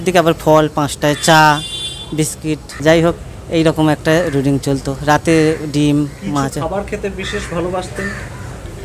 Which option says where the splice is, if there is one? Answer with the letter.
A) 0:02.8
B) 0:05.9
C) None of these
A